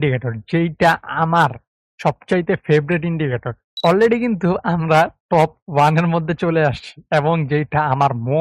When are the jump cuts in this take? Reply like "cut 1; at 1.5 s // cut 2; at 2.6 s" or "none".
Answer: cut 1; at 3.7 s